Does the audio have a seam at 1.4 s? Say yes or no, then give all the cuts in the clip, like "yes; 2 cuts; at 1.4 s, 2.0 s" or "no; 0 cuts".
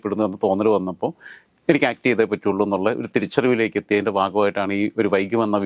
no; 0 cuts